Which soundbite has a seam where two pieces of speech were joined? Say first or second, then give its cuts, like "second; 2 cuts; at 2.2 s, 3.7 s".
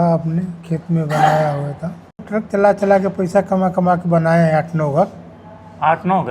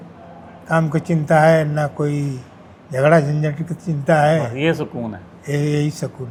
first; 1 cut; at 2.2 s